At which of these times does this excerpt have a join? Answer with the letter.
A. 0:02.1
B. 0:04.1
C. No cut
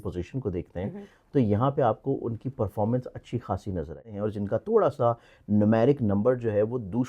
B